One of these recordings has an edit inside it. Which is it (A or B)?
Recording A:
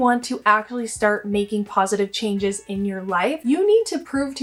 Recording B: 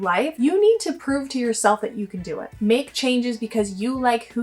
B